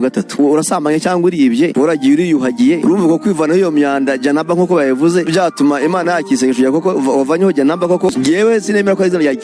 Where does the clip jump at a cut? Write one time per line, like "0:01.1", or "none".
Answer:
0:08.1